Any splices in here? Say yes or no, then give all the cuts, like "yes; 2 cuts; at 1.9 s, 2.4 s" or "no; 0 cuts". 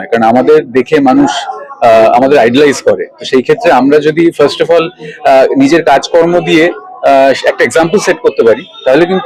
no; 0 cuts